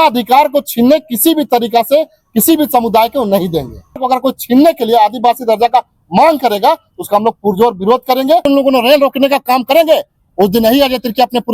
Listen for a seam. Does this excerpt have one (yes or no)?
yes